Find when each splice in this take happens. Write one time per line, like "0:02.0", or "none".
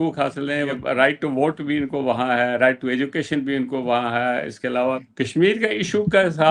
0:00.8
0:05.1